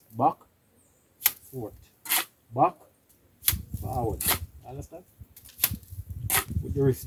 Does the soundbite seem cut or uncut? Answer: uncut